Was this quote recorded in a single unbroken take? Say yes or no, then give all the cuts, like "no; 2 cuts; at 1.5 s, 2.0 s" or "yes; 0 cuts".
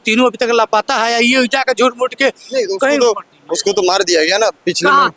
yes; 0 cuts